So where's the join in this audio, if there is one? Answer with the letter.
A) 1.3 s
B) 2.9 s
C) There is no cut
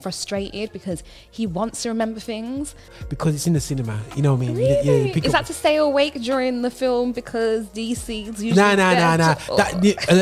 B